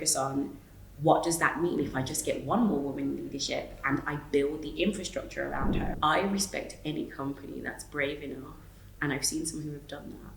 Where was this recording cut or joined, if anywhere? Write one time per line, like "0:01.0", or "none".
0:05.8